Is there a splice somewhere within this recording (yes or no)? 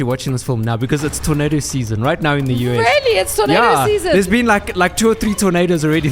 no